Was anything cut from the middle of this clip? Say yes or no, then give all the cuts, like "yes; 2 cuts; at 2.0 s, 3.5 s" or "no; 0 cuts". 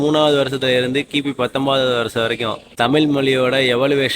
yes; 1 cut; at 2.6 s